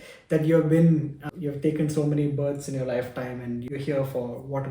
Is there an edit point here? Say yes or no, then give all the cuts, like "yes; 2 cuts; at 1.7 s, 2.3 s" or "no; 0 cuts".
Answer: yes; 2 cuts; at 1.2 s, 3.6 s